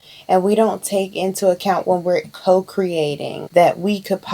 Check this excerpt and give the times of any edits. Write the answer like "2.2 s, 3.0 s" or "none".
3.3 s